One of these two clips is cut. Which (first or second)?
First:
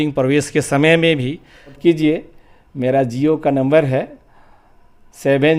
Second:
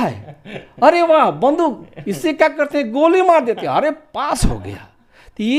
first